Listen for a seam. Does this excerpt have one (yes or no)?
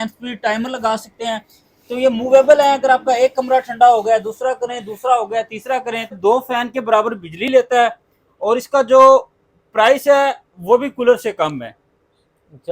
yes